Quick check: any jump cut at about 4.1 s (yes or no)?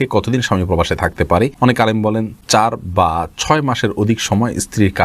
no